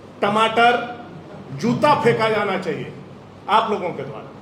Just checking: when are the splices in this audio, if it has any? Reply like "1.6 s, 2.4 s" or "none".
none

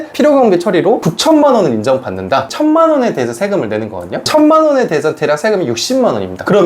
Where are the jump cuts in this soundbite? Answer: 2.5 s

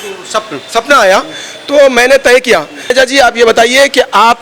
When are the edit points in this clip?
2.9 s

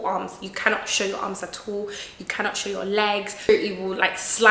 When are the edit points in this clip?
3.5 s

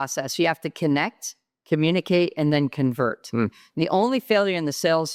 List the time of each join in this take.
none

